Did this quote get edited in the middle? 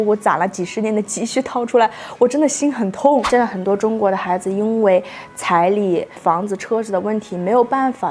yes; 1 cut; at 3.3 s

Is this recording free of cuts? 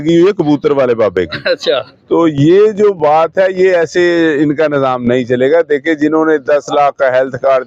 yes; 0 cuts

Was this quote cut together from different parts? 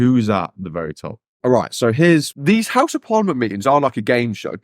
yes; 1 cut; at 2.3 s

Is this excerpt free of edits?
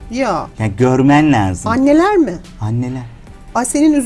yes; 0 cuts

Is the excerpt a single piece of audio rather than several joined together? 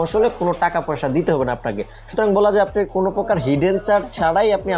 yes; 0 cuts

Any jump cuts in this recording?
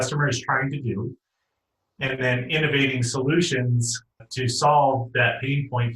yes; 1 cut; at 4.2 s

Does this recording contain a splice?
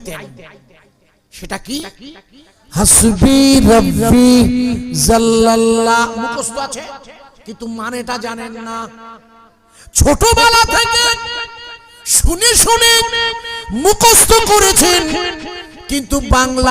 no; 0 cuts

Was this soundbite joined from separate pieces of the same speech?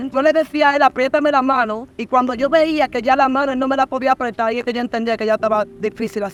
no; 0 cuts

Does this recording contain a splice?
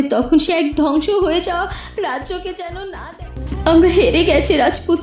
yes; 1 cut; at 3.3 s

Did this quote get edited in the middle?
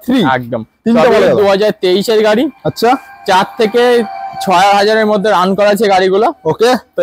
no; 0 cuts

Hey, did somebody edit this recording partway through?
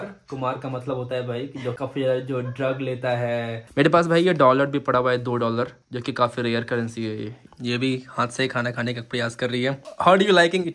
yes; 4 cuts; at 1.8 s, 3.6 s, 7.4 s, 9.9 s

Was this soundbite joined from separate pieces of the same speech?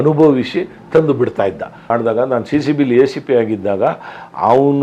yes; 1 cut; at 1.8 s

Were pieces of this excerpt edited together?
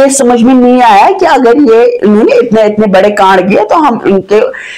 no; 0 cuts

